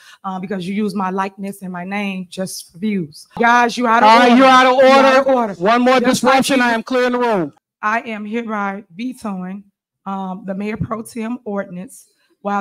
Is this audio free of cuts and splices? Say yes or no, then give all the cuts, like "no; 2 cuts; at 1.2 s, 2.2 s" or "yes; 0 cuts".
no; 2 cuts; at 3.3 s, 7.6 s